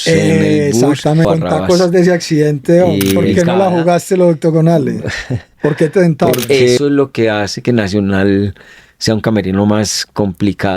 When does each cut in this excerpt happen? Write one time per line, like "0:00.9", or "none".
0:01.3
0:03.3
0:06.8